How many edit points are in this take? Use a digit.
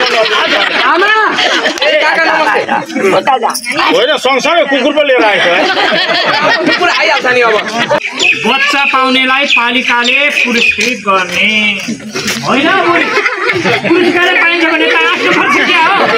1